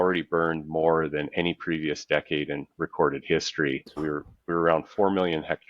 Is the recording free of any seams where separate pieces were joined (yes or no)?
no